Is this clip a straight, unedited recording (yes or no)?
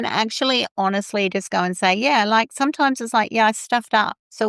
yes